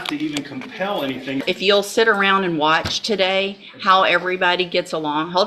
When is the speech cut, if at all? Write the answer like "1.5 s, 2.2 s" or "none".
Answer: 1.4 s